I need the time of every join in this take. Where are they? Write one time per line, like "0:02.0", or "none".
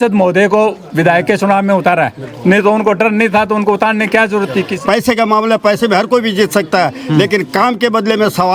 0:04.7